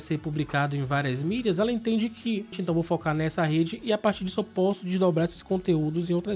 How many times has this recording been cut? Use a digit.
1